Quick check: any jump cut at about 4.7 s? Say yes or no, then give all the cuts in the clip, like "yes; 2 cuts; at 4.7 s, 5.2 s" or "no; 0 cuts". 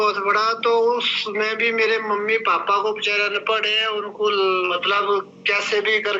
yes; 1 cut; at 4.7 s